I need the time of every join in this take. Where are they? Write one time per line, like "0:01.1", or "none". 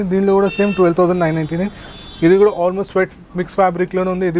none